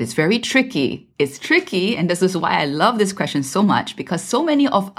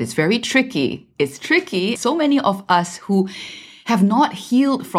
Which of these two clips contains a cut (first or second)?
second